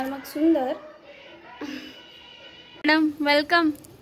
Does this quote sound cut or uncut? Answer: cut